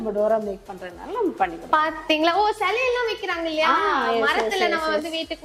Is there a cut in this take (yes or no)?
no